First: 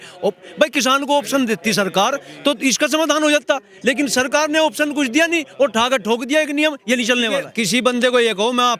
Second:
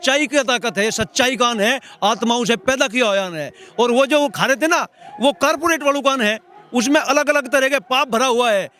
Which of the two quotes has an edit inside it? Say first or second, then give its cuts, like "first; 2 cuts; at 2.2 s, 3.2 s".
first; 1 cut; at 7.4 s